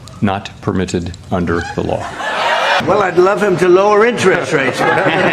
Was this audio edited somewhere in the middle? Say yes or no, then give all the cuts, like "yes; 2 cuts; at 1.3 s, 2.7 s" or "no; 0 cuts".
yes; 1 cut; at 2.8 s